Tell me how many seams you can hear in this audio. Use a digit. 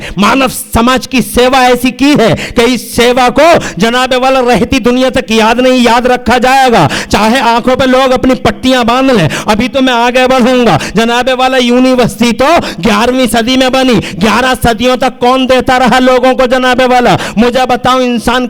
0